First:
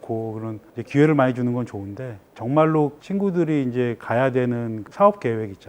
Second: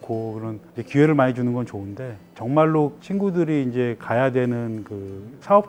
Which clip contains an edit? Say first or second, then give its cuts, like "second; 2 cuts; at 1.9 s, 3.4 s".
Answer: first; 1 cut; at 4.8 s